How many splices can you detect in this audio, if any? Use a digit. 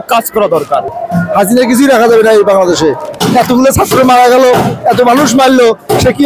2